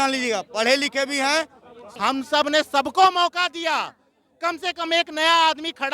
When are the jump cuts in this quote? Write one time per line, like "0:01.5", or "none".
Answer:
0:01.9

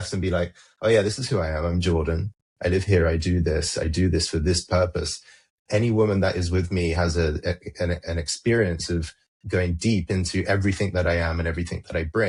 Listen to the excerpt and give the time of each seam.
none

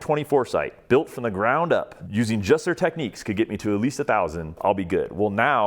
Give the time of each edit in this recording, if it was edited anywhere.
0:02.0
0:04.5

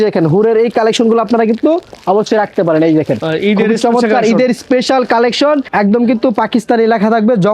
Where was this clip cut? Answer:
0:05.7

